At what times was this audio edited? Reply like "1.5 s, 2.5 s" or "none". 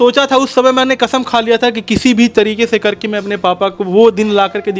none